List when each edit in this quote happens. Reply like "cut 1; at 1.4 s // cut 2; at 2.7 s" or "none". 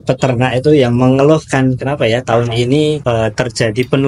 cut 1; at 3.0 s